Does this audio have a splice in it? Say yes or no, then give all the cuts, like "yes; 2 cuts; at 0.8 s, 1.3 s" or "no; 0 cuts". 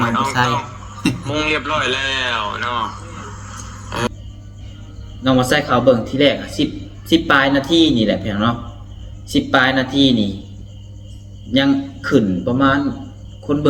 yes; 1 cut; at 4.1 s